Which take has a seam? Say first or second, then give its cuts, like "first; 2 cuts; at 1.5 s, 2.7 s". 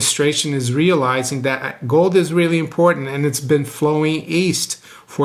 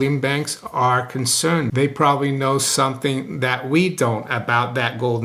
second; 1 cut; at 1.7 s